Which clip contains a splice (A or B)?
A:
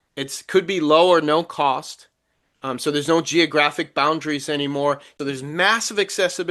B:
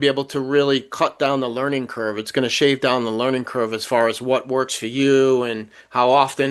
A